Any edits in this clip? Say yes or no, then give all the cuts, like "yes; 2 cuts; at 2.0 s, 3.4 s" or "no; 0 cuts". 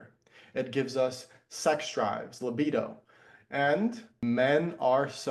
yes; 1 cut; at 4.2 s